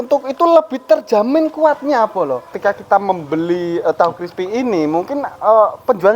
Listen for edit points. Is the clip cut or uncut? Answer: cut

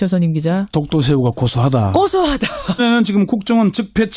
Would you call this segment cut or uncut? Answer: uncut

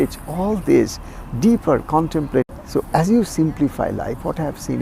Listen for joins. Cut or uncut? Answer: cut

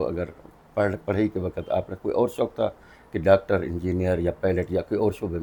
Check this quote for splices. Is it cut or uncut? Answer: uncut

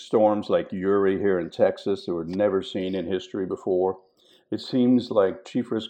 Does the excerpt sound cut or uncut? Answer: uncut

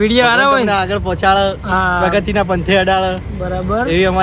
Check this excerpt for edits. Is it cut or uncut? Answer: uncut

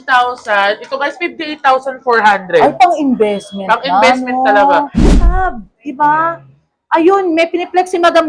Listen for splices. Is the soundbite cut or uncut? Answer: cut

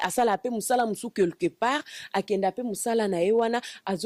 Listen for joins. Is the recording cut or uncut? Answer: uncut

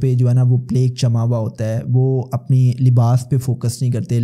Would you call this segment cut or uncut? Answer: uncut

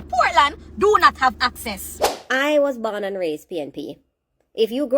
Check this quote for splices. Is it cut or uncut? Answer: cut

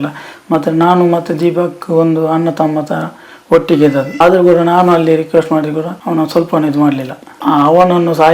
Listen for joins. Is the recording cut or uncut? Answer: cut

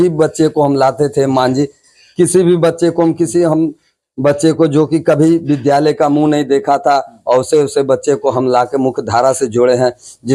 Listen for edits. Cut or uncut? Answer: uncut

